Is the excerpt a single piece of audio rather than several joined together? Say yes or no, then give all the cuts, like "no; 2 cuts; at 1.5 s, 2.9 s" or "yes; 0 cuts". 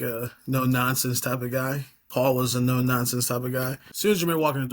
no; 1 cut; at 3.8 s